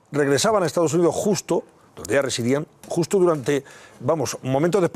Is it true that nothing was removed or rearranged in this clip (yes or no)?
no